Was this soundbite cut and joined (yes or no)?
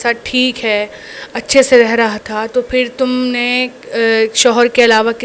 no